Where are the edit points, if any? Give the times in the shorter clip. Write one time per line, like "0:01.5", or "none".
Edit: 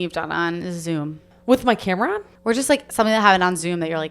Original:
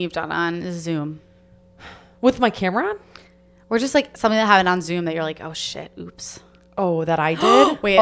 0:01.2
0:02.3